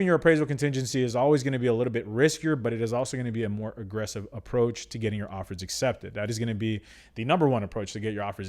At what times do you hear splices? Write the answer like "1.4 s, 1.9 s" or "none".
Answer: none